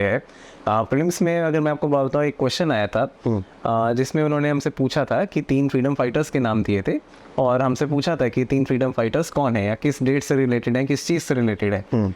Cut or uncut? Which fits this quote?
uncut